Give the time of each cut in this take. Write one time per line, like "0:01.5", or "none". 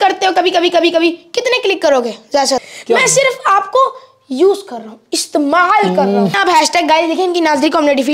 0:02.7
0:06.4

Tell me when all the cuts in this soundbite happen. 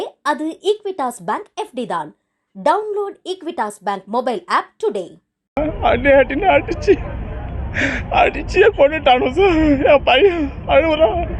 0:05.6

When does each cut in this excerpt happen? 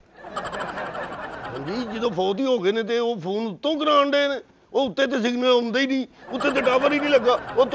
none

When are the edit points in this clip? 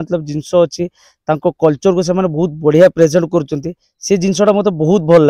none

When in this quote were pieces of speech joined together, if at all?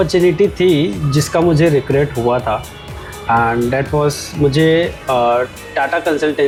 none

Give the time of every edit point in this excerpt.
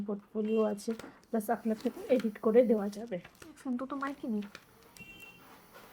none

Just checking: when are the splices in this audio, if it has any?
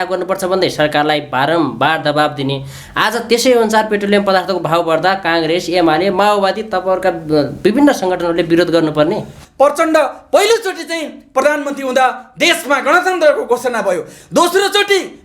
0:09.3

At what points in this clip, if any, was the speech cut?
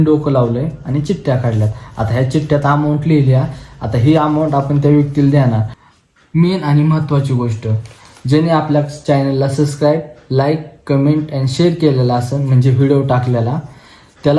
0:05.9

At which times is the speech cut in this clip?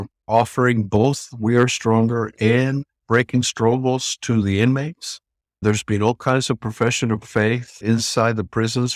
none

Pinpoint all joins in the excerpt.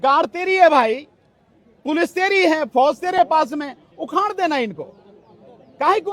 none

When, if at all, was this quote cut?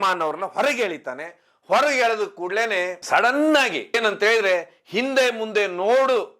0:04.0

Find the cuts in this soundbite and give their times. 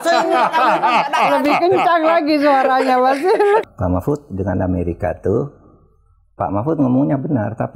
0:03.6

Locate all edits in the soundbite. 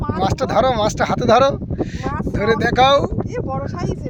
none

